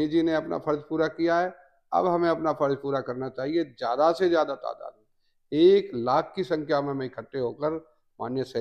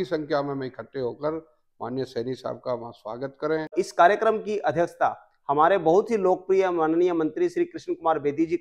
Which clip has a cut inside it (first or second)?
second